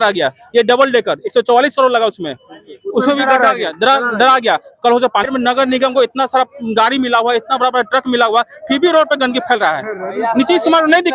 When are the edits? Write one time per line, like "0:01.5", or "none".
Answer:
0:05.3